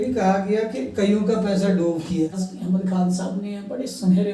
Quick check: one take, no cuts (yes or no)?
no